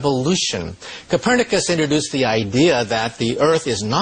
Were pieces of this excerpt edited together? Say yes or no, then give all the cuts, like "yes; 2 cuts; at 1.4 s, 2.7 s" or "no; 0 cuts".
no; 0 cuts